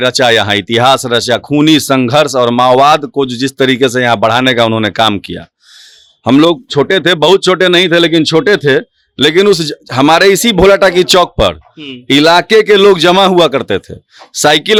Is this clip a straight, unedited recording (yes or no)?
yes